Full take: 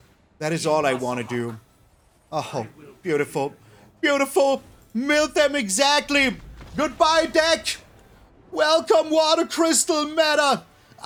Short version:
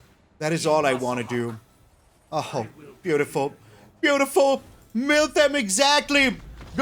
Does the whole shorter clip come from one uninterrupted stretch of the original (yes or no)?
yes